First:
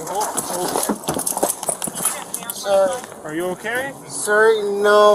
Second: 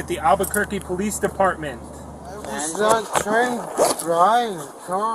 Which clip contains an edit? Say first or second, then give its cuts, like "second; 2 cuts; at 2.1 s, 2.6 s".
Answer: second; 1 cut; at 2.6 s